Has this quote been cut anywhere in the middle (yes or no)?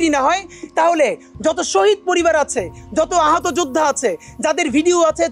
no